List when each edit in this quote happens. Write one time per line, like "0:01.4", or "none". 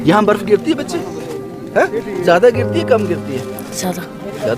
none